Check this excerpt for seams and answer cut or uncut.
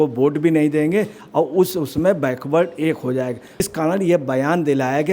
cut